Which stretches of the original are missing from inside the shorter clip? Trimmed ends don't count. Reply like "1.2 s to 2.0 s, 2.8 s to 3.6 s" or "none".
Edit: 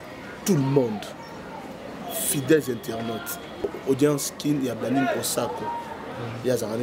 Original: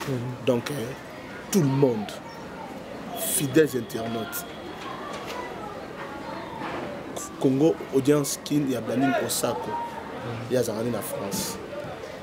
4.7 s to 7.7 s